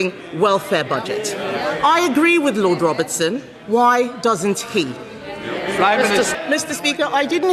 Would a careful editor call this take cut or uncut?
cut